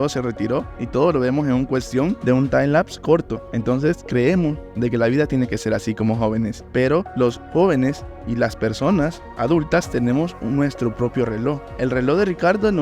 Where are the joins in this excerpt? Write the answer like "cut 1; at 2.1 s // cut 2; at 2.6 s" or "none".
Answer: cut 1; at 2.2 s // cut 2; at 3.8 s // cut 3; at 7.0 s // cut 4; at 9.2 s // cut 5; at 11.7 s

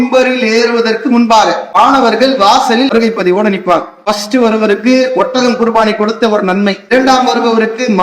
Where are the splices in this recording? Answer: cut 1; at 1.7 s // cut 2; at 2.9 s // cut 3; at 3.9 s // cut 4; at 6.9 s

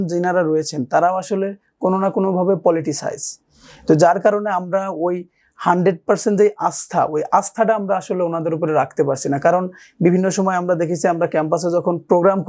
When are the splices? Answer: none

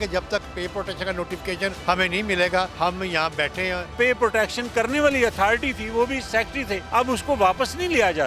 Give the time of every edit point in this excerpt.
cut 1; at 1.8 s // cut 2; at 2.7 s // cut 3; at 3.9 s // cut 4; at 6.5 s

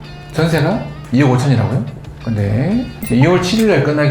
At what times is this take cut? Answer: cut 1; at 1.0 s // cut 2; at 3.0 s

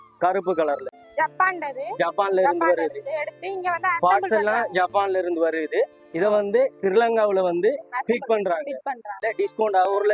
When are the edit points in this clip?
cut 1; at 1.0 s // cut 2; at 9.2 s

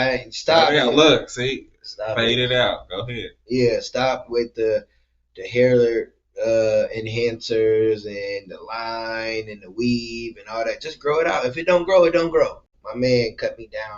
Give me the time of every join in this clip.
cut 1; at 12.8 s

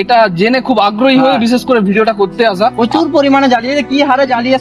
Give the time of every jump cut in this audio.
cut 1; at 2.7 s

